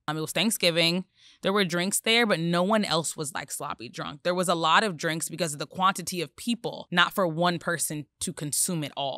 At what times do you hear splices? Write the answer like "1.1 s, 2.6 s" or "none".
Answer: 6.8 s

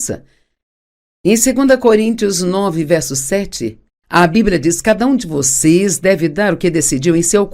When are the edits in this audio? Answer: 1.3 s

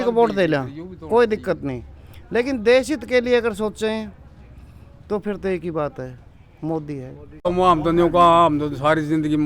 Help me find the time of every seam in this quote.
7.3 s

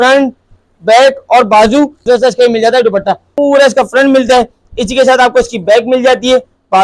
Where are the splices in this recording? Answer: 2.0 s, 3.4 s

